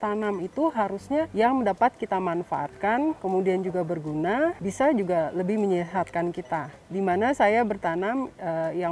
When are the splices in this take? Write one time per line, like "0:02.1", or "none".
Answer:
0:01.3
0:03.2
0:04.6
0:06.8